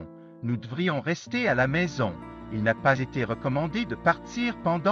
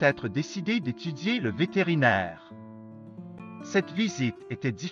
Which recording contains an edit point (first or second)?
second